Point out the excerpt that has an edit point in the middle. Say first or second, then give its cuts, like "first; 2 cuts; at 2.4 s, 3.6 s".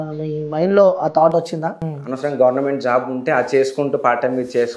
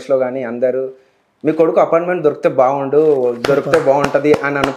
first; 1 cut; at 1.9 s